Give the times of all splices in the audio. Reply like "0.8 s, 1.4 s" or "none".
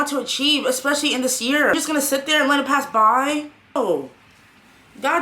1.7 s, 3.8 s